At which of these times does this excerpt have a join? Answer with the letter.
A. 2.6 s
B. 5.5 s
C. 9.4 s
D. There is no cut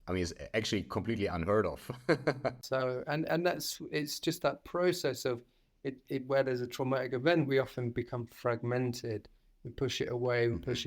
A